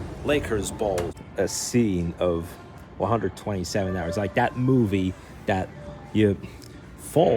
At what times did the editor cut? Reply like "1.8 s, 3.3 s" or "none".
1.2 s